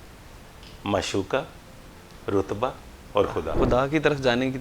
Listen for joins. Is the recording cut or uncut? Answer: cut